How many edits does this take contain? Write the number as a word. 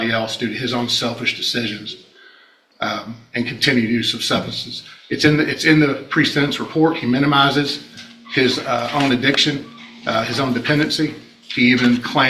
zero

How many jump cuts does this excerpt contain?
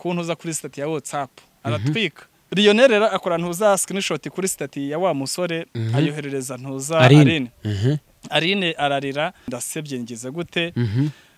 two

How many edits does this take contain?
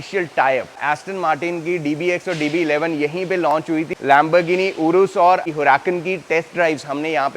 three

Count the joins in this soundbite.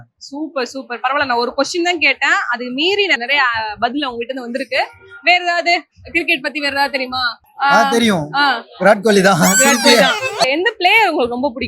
one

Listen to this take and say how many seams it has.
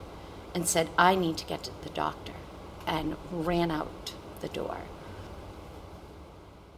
one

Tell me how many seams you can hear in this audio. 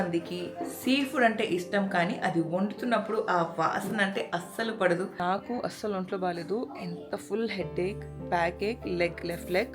one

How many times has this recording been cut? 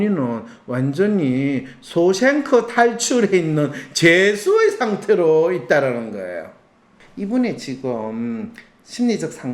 one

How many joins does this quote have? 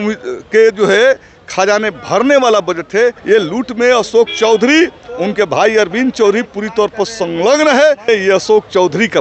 two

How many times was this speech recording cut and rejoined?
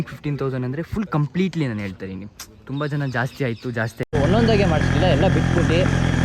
one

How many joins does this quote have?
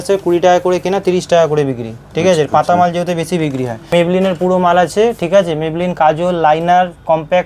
one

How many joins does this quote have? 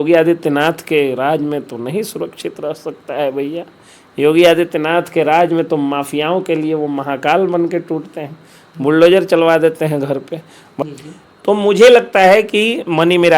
one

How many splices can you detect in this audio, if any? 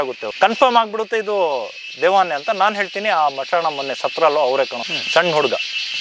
one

